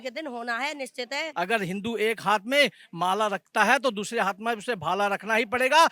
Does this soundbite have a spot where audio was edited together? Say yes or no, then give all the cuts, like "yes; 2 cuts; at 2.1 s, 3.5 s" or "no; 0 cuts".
yes; 1 cut; at 1.2 s